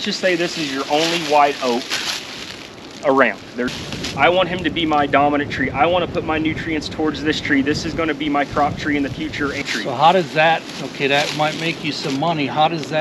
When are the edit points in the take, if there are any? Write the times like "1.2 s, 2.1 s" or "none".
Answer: 3.7 s, 9.6 s